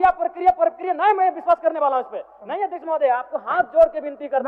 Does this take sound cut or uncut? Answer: uncut